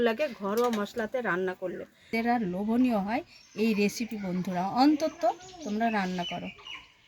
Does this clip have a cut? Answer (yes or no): yes